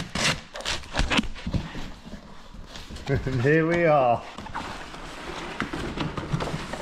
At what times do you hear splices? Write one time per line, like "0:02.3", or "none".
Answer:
none